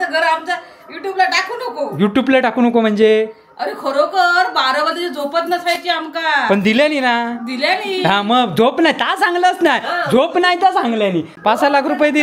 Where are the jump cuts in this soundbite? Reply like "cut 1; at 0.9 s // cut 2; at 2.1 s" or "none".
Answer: cut 1; at 11.3 s